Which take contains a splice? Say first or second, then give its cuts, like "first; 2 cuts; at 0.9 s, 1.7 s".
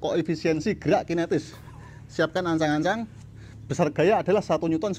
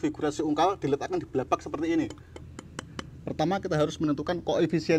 first; 1 cut; at 1.5 s